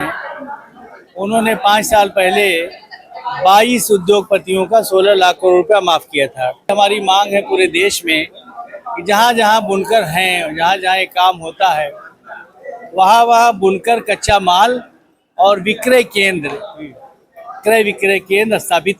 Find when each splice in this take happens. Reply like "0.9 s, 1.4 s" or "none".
6.7 s